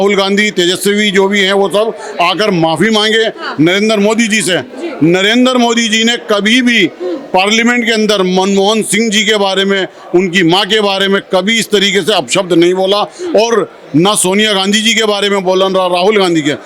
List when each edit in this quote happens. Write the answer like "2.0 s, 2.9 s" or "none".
none